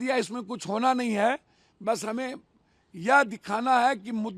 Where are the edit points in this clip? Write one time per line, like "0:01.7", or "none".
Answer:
none